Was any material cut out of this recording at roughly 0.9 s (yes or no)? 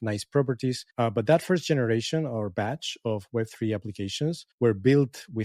yes